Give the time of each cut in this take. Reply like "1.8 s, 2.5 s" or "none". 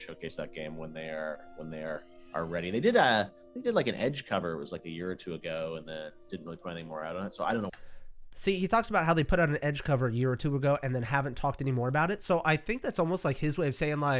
none